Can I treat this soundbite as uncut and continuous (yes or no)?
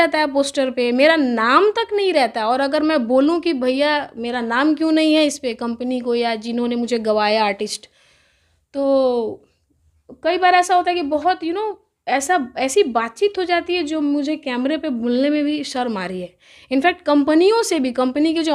yes